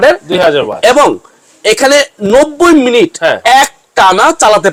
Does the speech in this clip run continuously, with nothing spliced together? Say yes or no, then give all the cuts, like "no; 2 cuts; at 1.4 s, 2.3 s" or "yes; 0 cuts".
yes; 0 cuts